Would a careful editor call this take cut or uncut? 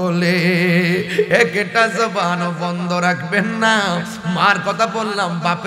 uncut